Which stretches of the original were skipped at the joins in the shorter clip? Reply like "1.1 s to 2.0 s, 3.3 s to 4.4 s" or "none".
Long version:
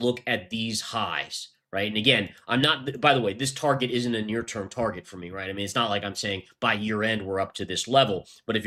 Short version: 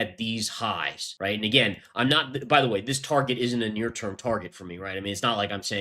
1.3 s to 1.5 s